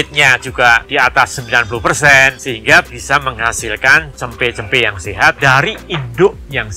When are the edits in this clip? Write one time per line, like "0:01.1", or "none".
0:02.4
0:05.4